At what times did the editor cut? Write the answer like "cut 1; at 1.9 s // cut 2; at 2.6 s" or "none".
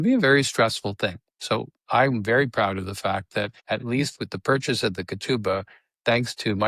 cut 1; at 3.6 s

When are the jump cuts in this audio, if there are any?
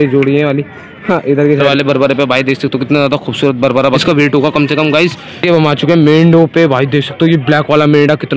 cut 1; at 1.7 s // cut 2; at 4.0 s // cut 3; at 5.3 s

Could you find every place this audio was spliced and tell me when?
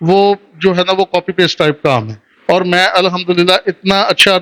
cut 1; at 2.3 s

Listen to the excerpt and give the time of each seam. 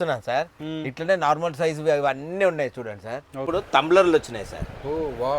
cut 1; at 3.5 s

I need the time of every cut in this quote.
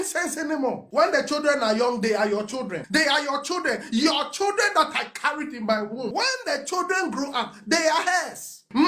cut 1; at 0.9 s // cut 2; at 2.7 s // cut 3; at 6.1 s

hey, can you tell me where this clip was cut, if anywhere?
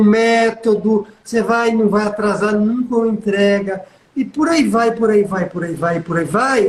none

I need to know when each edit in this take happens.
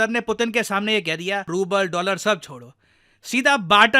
cut 1; at 1.5 s

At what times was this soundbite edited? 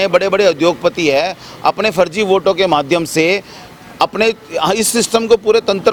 none

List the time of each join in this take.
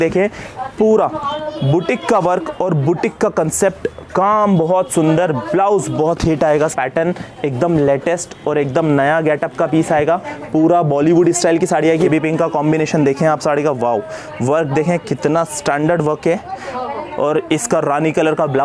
cut 1; at 6.7 s // cut 2; at 12.1 s

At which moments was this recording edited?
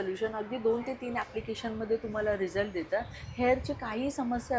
none

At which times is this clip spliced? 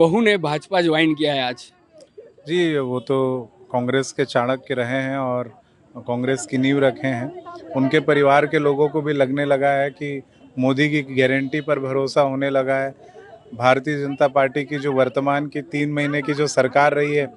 none

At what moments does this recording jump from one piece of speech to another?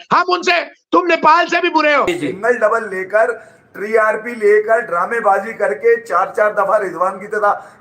cut 1; at 2.1 s

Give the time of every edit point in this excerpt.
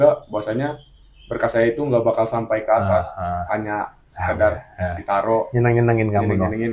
none

